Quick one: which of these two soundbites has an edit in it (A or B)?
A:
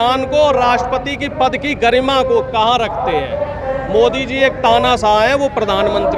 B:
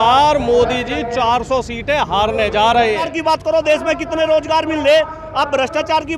B